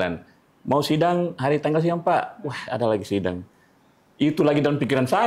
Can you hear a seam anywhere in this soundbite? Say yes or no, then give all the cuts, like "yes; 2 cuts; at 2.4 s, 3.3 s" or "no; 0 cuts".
no; 0 cuts